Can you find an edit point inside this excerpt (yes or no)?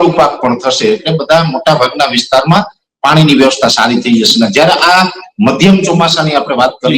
no